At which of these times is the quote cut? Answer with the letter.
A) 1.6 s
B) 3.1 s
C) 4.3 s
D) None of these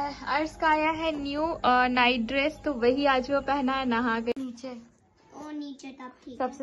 C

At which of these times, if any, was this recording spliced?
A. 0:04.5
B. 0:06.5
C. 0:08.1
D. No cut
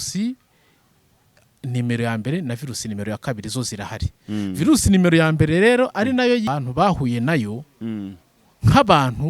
B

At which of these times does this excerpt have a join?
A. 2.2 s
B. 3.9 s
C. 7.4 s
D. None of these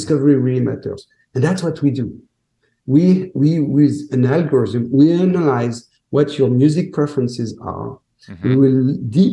D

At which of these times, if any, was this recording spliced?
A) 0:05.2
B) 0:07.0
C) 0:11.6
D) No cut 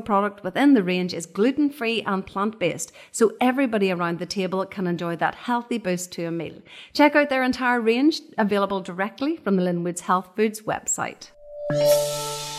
C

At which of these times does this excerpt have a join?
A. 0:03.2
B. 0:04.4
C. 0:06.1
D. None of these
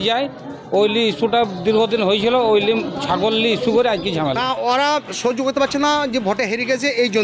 B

